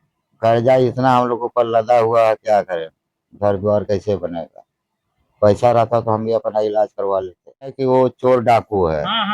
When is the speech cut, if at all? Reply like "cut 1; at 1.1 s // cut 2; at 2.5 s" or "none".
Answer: cut 1; at 7.8 s